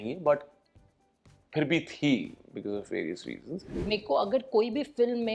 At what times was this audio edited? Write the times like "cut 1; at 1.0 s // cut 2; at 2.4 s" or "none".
cut 1; at 3.7 s